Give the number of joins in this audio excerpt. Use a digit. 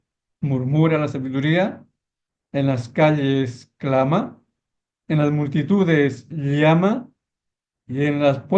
0